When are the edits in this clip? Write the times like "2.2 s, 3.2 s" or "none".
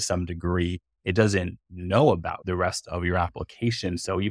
2.4 s